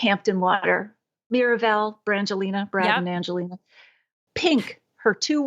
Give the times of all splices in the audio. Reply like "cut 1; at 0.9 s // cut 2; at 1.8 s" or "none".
cut 1; at 4.2 s